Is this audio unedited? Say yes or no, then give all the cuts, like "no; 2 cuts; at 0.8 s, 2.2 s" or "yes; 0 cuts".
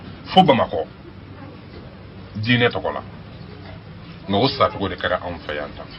yes; 0 cuts